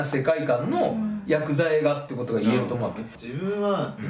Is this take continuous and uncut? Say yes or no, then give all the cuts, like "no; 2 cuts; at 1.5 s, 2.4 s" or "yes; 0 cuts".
no; 1 cut; at 3.1 s